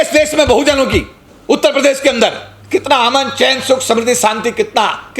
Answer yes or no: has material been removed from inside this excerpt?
yes